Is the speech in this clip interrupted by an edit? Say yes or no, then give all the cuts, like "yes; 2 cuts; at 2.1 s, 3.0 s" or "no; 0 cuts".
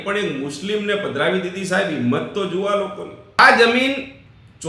yes; 1 cut; at 3.4 s